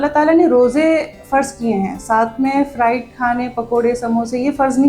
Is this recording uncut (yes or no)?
yes